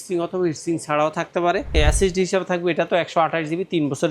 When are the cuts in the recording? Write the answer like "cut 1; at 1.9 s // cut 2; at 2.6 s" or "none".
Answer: cut 1; at 1.7 s